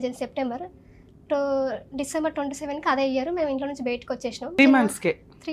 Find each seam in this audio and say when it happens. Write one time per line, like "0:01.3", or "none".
0:04.6